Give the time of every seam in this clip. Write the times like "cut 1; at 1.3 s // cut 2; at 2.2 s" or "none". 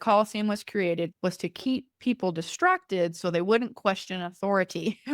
cut 1; at 1.1 s